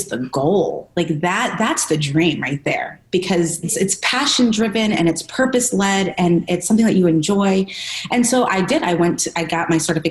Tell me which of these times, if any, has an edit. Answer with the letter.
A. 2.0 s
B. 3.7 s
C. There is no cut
B